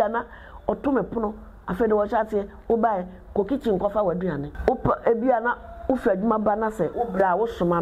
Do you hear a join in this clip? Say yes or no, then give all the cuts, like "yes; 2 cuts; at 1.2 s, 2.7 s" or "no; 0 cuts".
yes; 2 cuts; at 4.5 s, 6.9 s